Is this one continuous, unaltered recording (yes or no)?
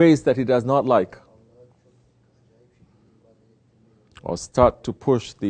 yes